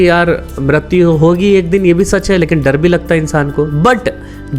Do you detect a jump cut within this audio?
no; 0 cuts

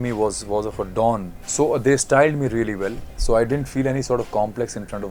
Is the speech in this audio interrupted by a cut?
yes; 1 cut; at 1.4 s

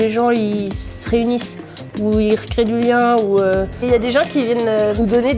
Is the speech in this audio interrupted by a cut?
no; 0 cuts

